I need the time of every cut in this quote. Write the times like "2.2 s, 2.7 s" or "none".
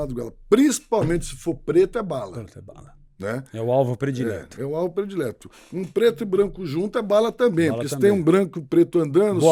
none